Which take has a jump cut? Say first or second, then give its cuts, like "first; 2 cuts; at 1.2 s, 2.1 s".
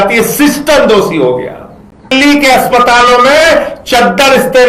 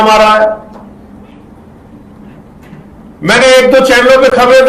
first; 1 cut; at 2.1 s